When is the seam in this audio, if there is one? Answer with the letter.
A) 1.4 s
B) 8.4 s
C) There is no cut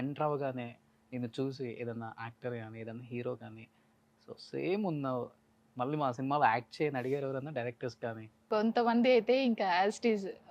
B